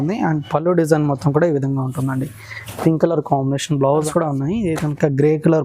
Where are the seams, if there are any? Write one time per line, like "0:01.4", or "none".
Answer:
0:04.1